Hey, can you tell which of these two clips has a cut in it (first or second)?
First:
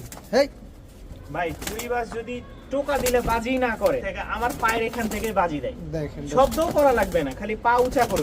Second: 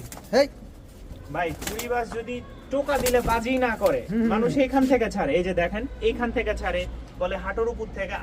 first